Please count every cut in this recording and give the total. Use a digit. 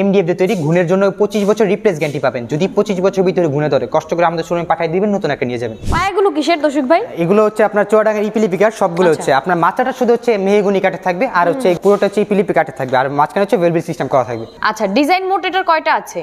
3